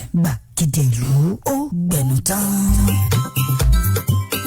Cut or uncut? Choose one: cut